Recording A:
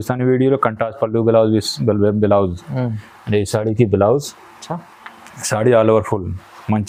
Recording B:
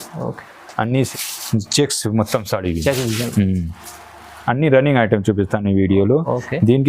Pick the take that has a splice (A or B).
B